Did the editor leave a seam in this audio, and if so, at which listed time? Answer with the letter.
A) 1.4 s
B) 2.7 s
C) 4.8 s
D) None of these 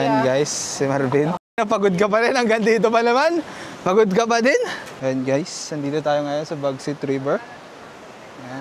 C